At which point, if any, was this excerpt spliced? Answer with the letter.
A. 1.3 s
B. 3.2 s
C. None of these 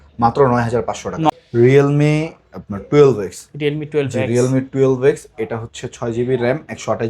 A